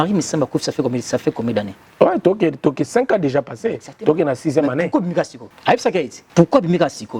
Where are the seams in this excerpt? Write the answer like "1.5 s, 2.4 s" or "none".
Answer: 1.8 s, 5.4 s, 6.2 s